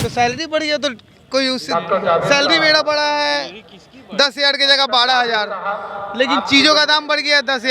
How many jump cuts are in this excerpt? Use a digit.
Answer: 0